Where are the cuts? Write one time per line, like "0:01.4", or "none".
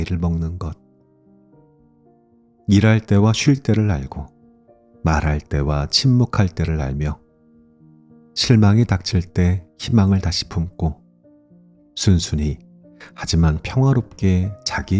0:01.2
0:02.6